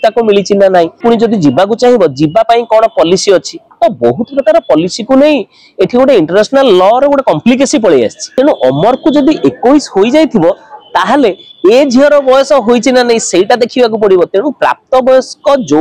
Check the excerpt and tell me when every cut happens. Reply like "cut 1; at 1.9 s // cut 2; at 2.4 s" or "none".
cut 1; at 1.0 s // cut 2; at 8.2 s